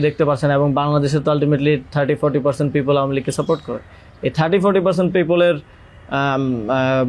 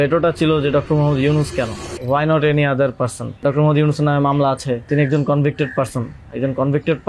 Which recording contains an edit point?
second; 3 cuts; at 1.9 s, 3.4 s, 4.9 s

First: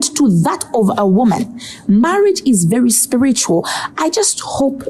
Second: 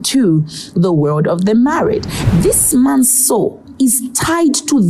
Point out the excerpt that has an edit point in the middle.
second; 1 cut; at 2.1 s

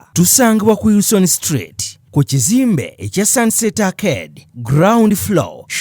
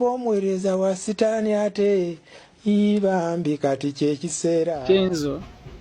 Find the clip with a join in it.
second; 1 cut; at 4.8 s

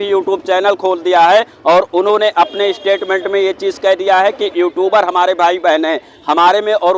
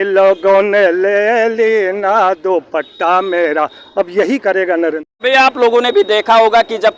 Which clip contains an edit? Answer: second; 1 cut; at 5.0 s

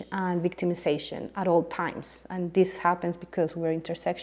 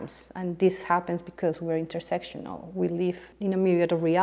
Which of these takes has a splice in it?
second; 1 cut; at 3.3 s

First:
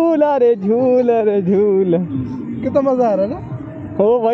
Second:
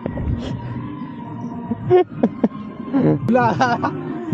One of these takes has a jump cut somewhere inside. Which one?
second; 1 cut; at 3.3 s

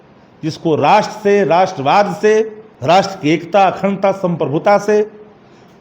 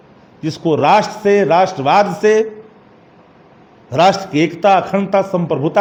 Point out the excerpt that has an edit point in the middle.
first; 1 cut; at 2.7 s

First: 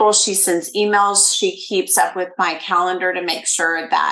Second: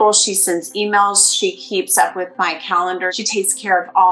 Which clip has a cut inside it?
second; 1 cut; at 3.1 s

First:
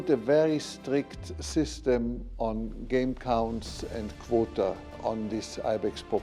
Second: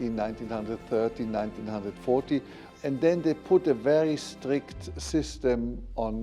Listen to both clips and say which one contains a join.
second; 1 cut; at 2.6 s

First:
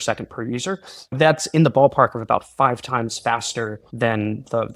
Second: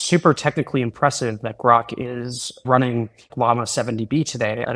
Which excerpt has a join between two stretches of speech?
first; 1 cut; at 3.8 s

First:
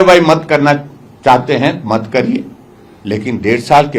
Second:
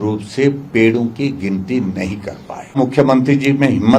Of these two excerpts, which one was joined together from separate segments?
second; 1 cut; at 2.8 s

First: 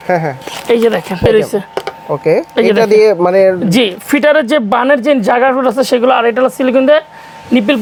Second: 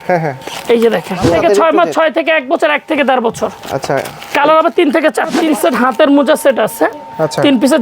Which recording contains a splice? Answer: second; 2 cuts; at 1.2 s, 5.4 s

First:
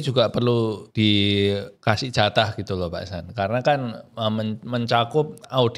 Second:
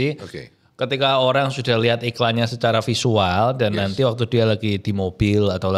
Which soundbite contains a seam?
first; 2 cuts; at 0.8 s, 1.7 s

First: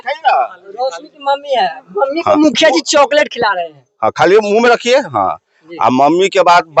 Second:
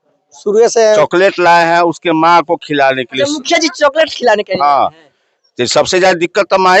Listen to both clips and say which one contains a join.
second; 1 cut; at 1.0 s

